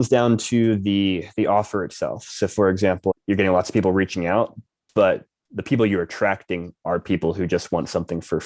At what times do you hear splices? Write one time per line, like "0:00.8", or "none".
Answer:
0:03.1